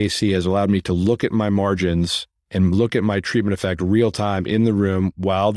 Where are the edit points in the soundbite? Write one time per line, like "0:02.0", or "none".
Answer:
none